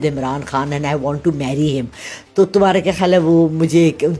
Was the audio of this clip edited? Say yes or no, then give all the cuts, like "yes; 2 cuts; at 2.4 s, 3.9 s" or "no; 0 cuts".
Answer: no; 0 cuts